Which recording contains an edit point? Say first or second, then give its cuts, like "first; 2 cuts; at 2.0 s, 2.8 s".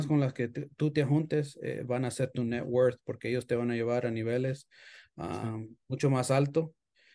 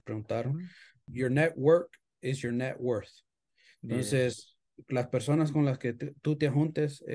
second; 1 cut; at 1.0 s